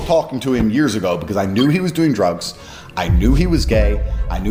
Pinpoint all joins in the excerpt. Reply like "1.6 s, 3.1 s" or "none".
none